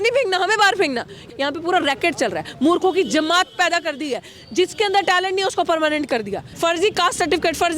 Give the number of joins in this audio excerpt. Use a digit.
2